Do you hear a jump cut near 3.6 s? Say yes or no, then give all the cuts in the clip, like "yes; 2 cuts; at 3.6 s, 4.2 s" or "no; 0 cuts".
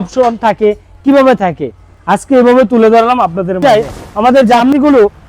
yes; 1 cut; at 3.6 s